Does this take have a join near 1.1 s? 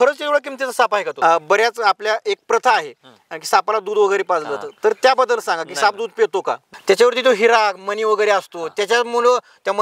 yes; 2 cuts; at 1.1 s, 6.7 s

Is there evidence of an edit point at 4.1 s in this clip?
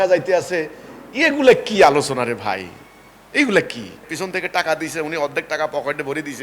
yes; 1 cut; at 4.1 s

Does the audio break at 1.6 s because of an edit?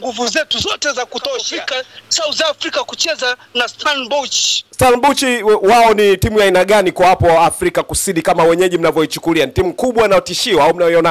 yes; 1 cut; at 1.6 s

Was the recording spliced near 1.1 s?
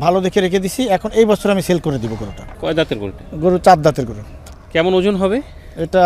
no; 2 cuts; at 2.5 s, 4.5 s

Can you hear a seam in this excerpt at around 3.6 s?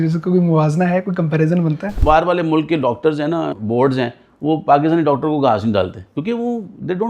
yes; 3 cuts; at 2.0 s, 3.6 s, 6.0 s

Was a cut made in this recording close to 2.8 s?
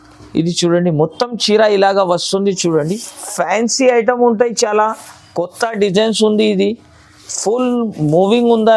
no; 0 cuts

